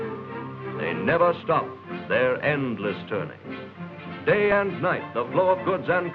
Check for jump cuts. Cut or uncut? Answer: cut